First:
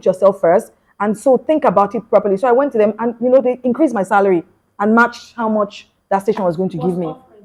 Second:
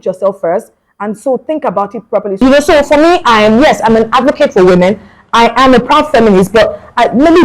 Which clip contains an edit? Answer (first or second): second